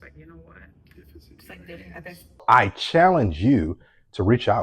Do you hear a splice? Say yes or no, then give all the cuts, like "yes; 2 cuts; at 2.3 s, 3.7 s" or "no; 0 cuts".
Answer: yes; 1 cut; at 2.3 s